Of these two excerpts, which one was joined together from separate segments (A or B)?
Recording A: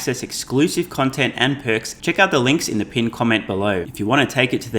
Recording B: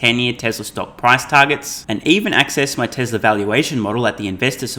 A